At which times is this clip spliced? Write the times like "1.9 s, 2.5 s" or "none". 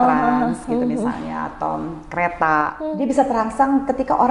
2.7 s